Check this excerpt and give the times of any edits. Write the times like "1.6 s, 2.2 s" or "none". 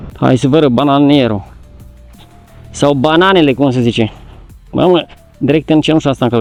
none